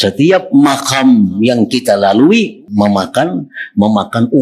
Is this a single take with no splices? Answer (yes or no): no